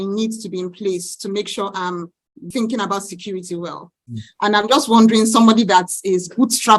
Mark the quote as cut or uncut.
cut